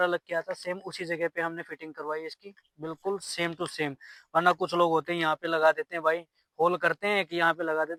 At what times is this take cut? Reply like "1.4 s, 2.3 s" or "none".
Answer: none